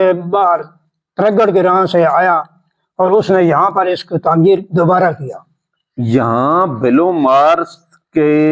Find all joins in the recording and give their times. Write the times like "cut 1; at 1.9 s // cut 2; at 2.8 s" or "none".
none